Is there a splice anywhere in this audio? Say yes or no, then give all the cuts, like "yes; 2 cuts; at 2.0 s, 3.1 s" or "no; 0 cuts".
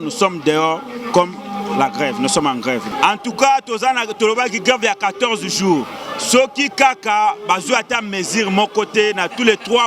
yes; 1 cut; at 2.9 s